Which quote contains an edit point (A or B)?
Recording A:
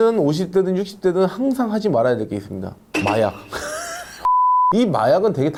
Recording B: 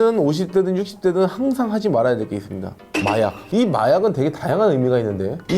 B